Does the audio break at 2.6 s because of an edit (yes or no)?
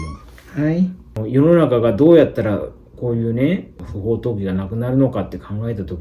no